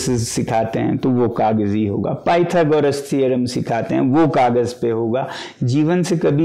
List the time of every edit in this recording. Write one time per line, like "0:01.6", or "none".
none